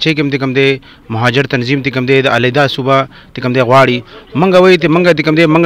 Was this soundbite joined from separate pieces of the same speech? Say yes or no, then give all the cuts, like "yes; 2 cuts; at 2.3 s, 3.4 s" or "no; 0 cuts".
no; 0 cuts